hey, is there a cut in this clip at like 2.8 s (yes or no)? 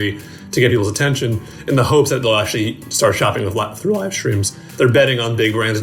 no